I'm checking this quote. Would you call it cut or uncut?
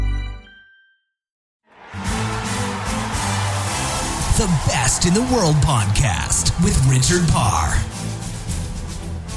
cut